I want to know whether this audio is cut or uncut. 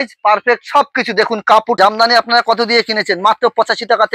cut